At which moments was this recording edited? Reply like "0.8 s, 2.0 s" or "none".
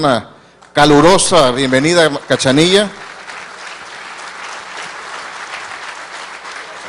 none

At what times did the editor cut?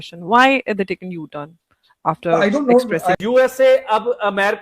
3.2 s

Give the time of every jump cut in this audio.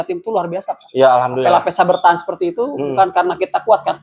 none

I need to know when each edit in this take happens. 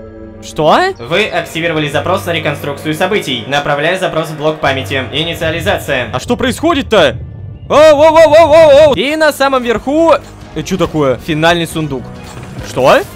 1.1 s, 3.4 s, 9.0 s

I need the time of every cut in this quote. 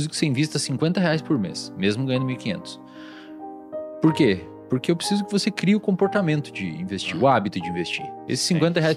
none

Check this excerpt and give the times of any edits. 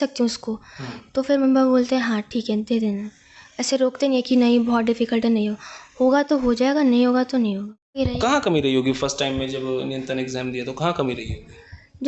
7.9 s

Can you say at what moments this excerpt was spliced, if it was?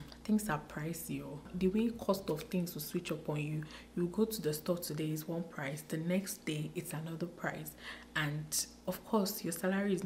none

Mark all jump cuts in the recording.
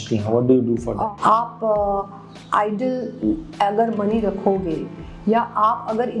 0.9 s

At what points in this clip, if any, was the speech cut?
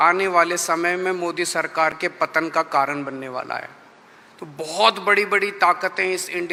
none

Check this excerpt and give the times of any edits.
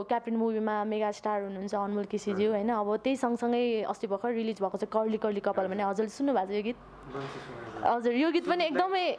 none

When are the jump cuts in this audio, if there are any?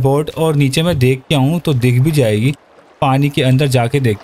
none

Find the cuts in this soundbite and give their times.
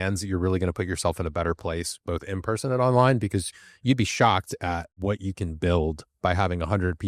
4.9 s

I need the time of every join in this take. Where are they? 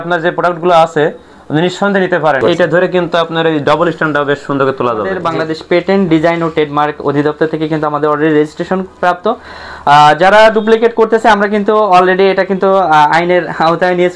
2.4 s, 5.2 s

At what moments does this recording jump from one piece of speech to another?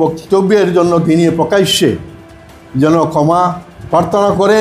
none

